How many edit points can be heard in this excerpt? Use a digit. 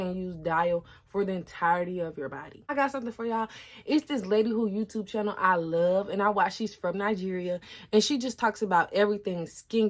0